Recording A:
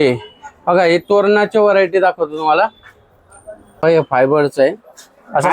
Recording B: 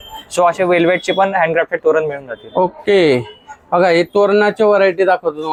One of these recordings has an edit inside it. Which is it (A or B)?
A